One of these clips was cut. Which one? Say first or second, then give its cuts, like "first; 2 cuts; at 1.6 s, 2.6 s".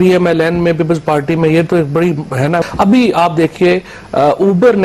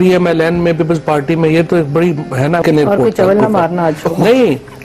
second; 1 cut; at 2.6 s